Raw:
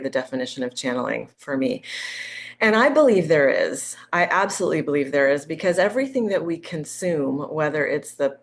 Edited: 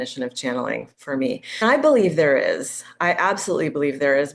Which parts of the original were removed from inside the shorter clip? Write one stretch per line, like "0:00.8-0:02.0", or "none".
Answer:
0:02.0-0:02.7